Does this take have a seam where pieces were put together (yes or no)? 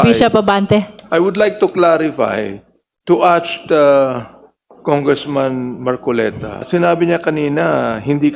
yes